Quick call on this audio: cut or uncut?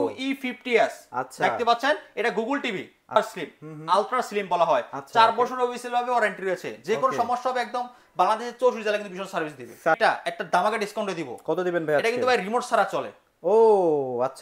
cut